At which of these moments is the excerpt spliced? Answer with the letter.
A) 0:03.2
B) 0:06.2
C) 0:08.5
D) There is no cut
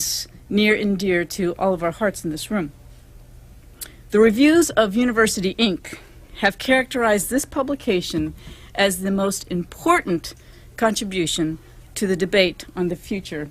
A